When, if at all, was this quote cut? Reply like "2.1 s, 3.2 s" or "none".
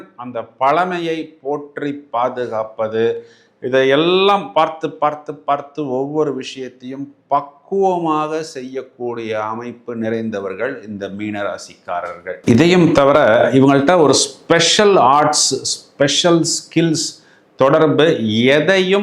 none

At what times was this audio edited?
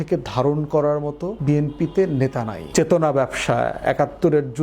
1.3 s, 2.6 s

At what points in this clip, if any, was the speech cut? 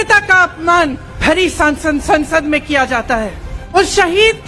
1.1 s, 3.8 s

